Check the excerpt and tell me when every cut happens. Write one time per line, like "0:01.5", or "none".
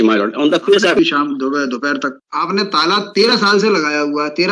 0:01.0
0:02.1